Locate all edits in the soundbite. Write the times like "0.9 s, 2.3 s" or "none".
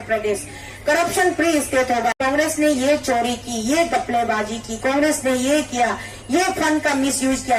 2.1 s